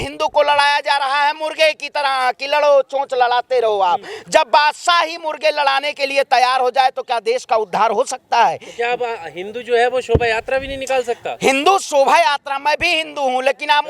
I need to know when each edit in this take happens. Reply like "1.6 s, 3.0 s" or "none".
none